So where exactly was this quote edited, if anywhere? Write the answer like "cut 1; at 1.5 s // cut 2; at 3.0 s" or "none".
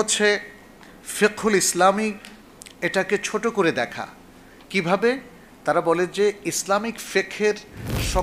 none